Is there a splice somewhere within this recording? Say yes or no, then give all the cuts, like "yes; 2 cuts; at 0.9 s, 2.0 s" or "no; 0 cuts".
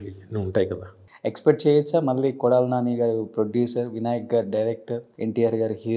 yes; 2 cuts; at 1.1 s, 5.1 s